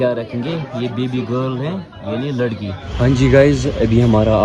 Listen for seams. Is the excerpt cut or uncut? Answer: cut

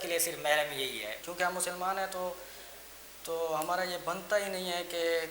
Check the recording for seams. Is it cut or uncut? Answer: cut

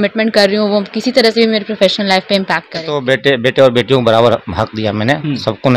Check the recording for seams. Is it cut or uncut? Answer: cut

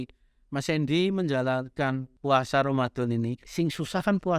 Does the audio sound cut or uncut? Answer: cut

